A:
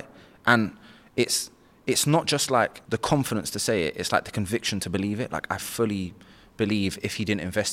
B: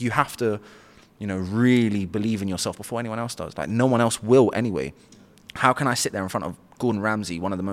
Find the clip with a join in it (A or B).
A